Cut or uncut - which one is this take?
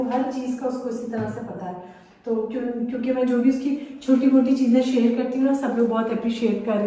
uncut